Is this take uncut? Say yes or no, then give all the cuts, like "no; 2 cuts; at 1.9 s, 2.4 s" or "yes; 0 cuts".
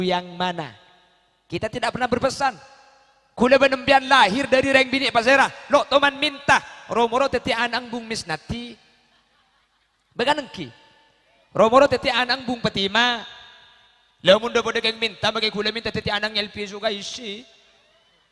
yes; 0 cuts